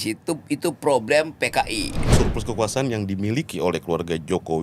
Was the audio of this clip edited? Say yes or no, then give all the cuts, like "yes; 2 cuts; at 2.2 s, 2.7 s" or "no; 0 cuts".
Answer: yes; 1 cut; at 2.1 s